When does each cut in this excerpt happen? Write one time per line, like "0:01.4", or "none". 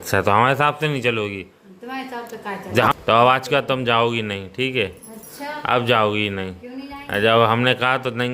0:02.9